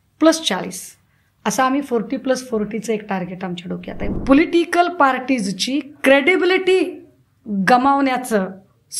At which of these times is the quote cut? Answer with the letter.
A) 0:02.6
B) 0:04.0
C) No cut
B